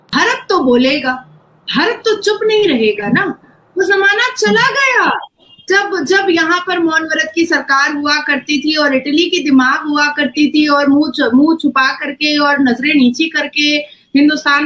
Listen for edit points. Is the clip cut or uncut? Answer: uncut